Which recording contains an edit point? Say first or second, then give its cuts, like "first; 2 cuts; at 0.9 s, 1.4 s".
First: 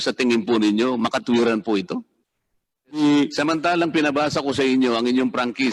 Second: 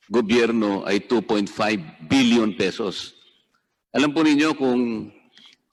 first; 1 cut; at 3.0 s